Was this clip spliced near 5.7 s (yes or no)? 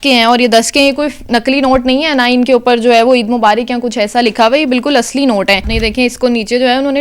yes